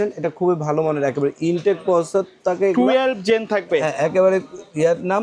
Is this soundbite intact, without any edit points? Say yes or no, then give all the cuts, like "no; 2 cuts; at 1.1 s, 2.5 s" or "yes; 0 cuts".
yes; 0 cuts